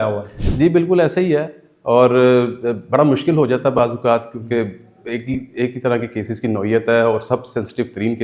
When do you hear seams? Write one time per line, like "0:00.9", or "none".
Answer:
none

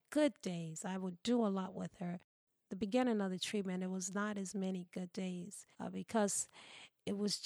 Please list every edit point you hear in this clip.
0:05.6

